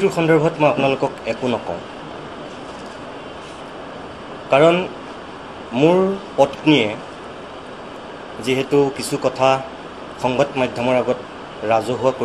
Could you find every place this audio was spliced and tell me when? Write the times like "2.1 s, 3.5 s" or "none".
none